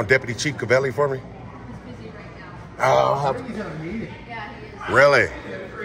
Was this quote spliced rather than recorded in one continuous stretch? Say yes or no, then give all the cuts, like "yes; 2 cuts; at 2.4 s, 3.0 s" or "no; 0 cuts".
no; 0 cuts